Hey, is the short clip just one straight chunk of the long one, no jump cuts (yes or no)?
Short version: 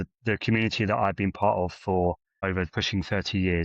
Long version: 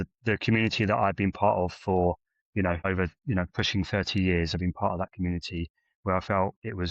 no